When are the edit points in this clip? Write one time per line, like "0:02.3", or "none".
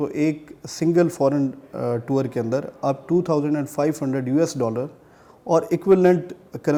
none